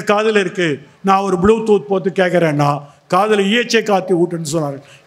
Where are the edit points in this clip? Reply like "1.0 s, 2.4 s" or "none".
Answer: none